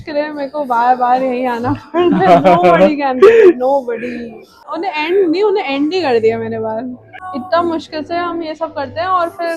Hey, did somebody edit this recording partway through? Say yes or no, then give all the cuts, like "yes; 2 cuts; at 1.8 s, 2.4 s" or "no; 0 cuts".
yes; 2 cuts; at 4.6 s, 7.1 s